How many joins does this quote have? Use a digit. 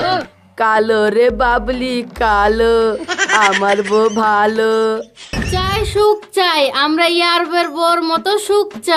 1